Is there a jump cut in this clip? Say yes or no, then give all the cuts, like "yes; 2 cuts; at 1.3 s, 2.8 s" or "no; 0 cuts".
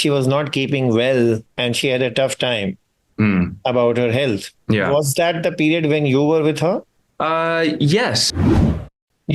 yes; 3 cuts; at 1.5 s, 4.5 s, 8.6 s